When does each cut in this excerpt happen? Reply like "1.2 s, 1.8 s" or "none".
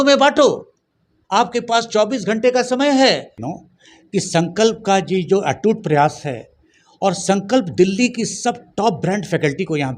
3.4 s